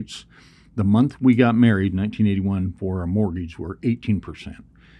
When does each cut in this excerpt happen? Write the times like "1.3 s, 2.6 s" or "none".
none